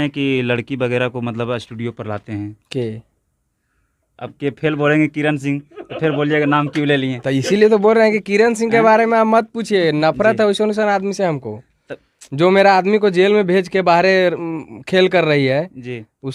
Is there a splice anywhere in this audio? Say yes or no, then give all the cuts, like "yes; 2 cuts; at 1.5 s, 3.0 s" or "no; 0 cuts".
no; 0 cuts